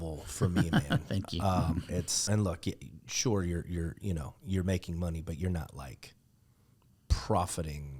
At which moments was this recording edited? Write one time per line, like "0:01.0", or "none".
0:02.2